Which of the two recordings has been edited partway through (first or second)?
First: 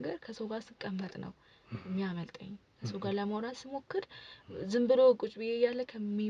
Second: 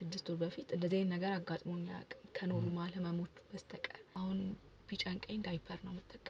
second